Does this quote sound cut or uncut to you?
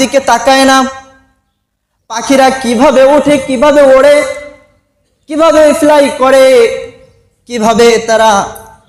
uncut